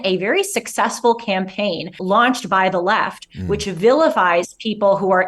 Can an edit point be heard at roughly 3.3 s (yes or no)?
no